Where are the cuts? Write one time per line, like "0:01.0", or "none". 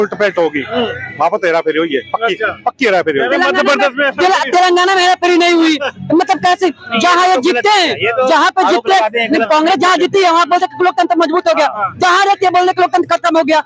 none